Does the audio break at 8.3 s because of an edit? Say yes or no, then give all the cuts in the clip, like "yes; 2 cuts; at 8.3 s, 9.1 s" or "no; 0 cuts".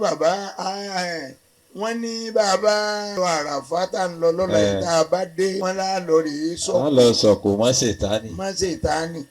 no; 2 cuts; at 3.1 s, 5.6 s